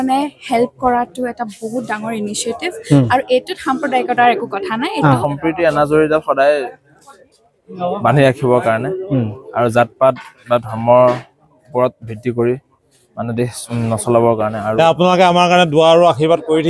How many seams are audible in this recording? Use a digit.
3